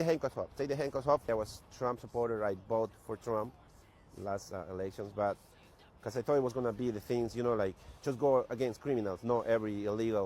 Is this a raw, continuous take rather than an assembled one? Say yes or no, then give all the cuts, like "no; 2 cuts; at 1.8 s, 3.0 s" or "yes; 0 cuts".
no; 1 cut; at 7.9 s